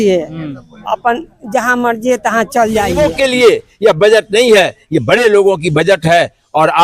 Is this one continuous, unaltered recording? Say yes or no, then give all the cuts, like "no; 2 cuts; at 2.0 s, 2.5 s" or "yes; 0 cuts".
no; 1 cut; at 3.0 s